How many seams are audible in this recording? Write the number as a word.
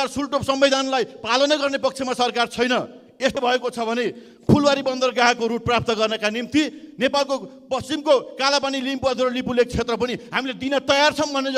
one